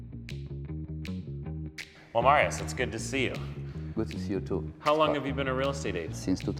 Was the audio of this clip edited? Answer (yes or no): no